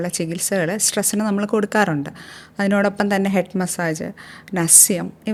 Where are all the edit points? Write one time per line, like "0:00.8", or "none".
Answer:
none